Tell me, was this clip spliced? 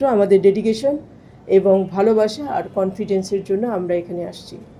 no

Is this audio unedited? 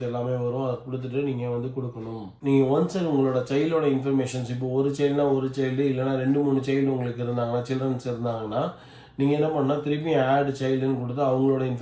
yes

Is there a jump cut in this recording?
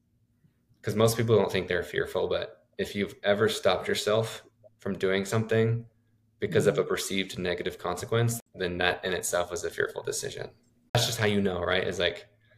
yes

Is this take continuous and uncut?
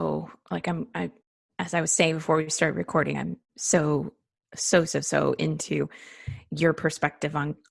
yes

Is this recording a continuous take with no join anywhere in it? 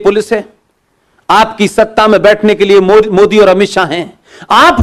yes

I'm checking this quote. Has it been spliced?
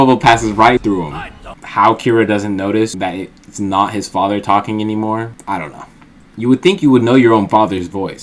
yes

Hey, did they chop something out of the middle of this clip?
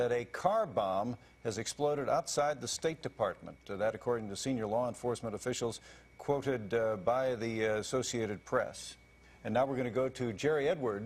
no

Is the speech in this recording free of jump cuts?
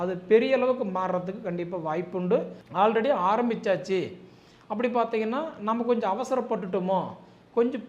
no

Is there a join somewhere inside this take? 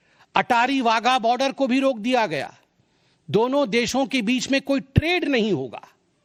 no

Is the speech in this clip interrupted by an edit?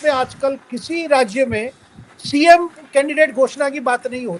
no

